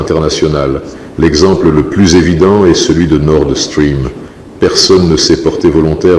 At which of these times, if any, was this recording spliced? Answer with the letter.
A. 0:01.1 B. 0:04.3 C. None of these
B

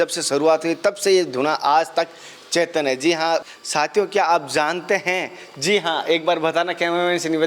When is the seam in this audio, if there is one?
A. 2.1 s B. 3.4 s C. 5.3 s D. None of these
B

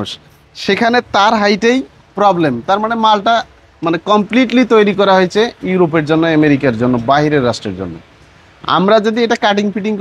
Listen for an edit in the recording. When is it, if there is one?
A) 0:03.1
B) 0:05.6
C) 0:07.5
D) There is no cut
D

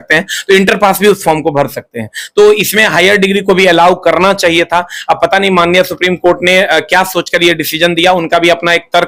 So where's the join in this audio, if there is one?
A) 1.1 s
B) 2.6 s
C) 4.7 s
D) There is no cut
D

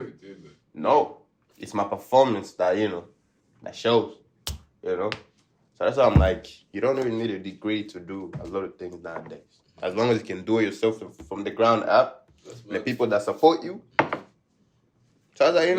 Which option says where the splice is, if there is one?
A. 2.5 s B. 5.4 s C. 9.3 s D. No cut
D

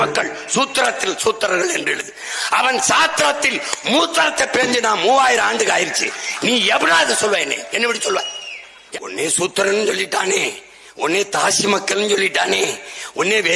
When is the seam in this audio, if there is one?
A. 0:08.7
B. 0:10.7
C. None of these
A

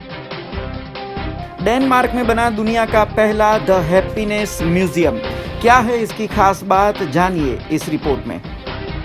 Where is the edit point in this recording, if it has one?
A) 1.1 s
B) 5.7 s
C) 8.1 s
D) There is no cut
A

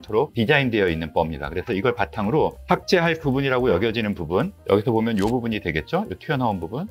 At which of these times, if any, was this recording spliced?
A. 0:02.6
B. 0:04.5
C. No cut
A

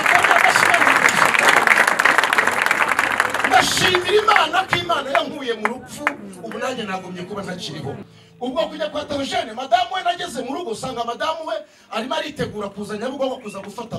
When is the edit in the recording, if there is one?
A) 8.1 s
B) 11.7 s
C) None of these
A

